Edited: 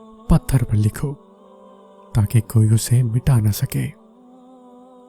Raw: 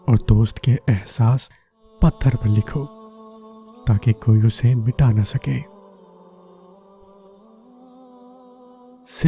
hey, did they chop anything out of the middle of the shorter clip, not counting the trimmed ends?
yes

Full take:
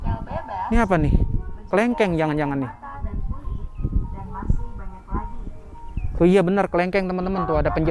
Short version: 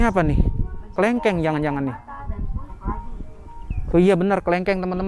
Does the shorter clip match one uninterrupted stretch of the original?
no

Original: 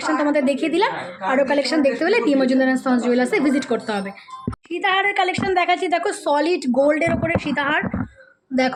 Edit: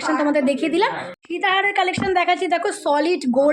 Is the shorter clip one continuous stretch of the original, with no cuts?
no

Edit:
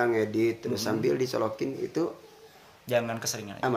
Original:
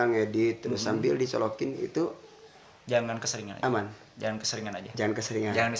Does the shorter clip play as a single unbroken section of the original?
yes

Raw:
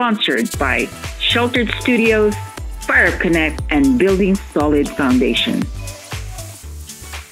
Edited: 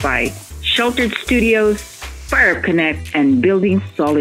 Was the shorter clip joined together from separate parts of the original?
no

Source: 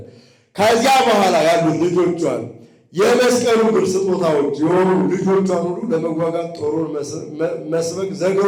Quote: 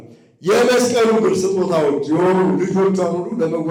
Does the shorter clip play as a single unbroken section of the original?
yes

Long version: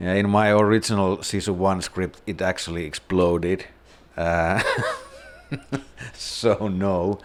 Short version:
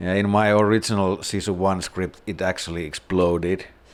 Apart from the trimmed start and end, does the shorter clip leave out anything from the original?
no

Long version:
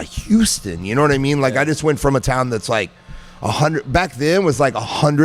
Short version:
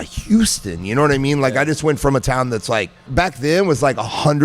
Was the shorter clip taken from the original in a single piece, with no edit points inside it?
no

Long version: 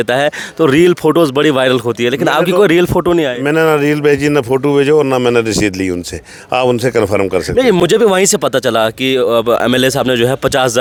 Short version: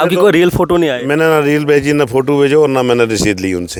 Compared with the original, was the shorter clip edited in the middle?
no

